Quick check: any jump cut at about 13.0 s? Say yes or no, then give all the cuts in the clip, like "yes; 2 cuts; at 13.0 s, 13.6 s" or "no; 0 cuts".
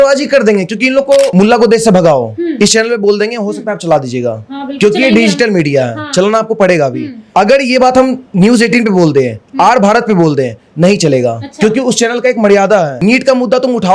yes; 3 cuts; at 1.3 s, 7.1 s, 13.0 s